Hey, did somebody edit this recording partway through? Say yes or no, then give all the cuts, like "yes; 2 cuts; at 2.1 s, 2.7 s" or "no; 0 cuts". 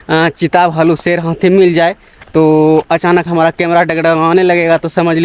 no; 0 cuts